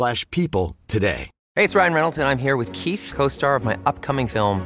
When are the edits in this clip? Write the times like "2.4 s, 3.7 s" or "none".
1.3 s

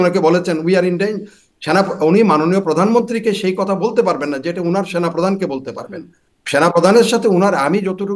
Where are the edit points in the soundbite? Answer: none

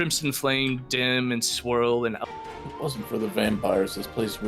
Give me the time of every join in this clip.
2.2 s

